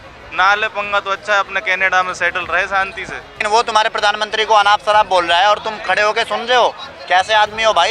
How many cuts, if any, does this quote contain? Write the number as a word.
one